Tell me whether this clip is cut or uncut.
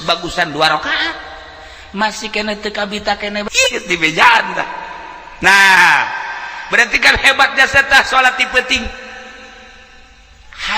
cut